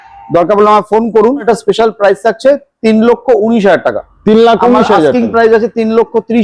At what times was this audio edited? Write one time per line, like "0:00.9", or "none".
0:01.4